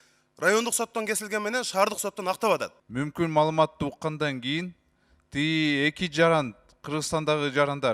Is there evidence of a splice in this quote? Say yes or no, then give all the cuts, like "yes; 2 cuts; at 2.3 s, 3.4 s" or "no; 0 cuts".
yes; 1 cut; at 2.8 s